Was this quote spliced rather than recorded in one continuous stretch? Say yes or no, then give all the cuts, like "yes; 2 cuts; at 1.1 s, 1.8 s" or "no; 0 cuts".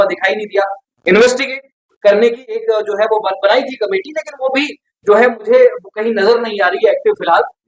no; 0 cuts